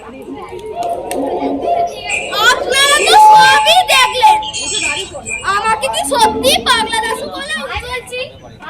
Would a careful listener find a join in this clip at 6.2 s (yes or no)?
no